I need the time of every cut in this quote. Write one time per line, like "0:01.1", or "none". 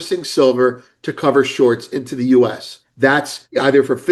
0:03.1